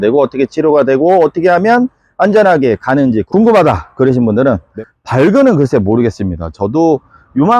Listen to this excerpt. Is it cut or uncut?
cut